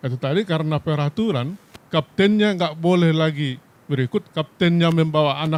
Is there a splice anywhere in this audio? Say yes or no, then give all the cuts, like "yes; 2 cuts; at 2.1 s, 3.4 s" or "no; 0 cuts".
no; 0 cuts